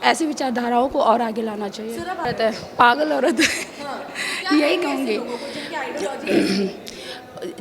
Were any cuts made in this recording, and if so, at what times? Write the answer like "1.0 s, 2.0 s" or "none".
2.2 s